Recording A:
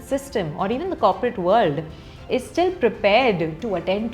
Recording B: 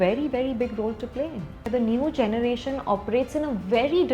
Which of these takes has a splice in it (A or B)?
B